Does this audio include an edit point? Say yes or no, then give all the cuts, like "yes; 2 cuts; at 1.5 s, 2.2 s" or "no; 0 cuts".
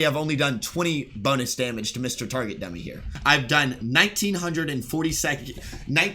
yes; 1 cut; at 3.1 s